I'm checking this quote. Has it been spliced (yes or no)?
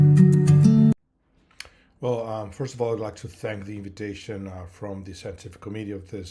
yes